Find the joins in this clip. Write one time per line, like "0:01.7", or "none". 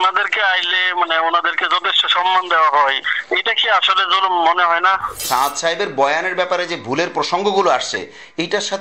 0:05.2